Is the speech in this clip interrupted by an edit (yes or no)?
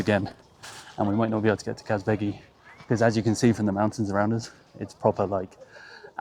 no